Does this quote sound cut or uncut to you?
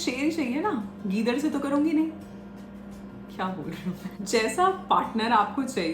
cut